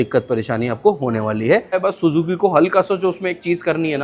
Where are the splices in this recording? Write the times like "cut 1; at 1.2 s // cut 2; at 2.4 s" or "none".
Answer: cut 1; at 1.8 s